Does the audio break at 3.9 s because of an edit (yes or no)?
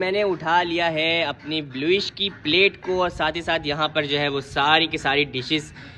no